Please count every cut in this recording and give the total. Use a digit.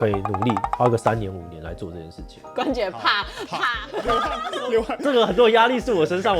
1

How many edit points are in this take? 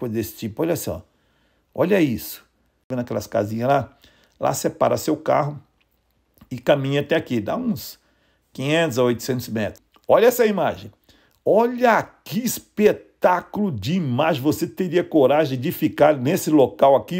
2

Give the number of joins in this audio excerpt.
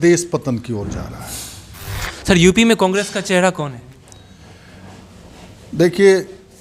1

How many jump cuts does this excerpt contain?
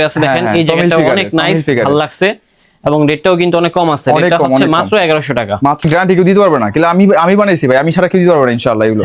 1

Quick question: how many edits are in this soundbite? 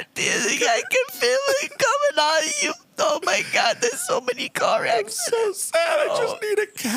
0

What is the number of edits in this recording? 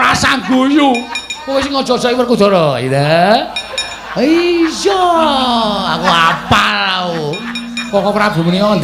1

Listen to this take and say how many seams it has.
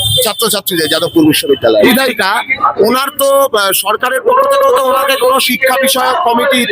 1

